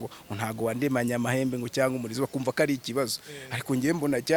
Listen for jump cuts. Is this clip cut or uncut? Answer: uncut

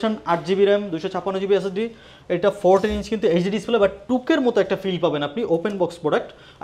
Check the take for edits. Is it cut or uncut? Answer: uncut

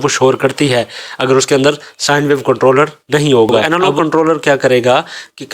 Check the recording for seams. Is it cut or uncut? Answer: cut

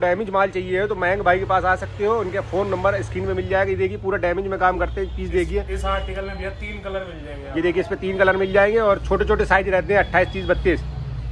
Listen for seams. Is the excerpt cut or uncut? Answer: uncut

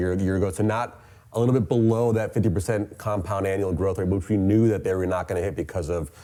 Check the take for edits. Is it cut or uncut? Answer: uncut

